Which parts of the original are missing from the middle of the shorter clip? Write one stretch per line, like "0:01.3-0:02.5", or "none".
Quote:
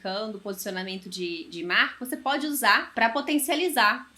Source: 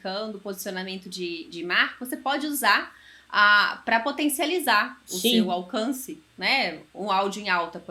0:02.9-0:03.8